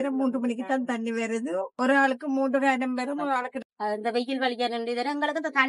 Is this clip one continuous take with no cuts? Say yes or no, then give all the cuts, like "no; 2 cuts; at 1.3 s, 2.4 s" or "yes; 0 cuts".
no; 1 cut; at 3.5 s